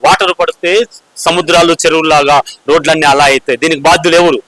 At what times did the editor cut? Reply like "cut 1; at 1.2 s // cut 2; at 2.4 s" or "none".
none